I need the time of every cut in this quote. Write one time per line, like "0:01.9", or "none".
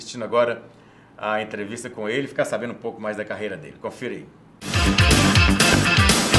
0:04.5